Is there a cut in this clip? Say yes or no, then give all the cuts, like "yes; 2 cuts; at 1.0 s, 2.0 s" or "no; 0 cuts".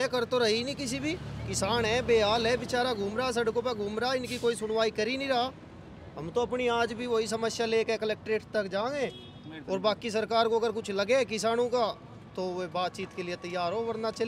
no; 0 cuts